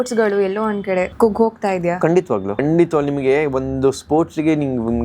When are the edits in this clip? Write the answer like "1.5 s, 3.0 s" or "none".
1.1 s, 2.6 s